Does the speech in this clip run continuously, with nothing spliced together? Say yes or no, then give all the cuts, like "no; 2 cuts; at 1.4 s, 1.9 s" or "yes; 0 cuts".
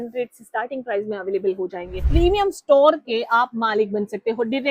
no; 1 cut; at 2.0 s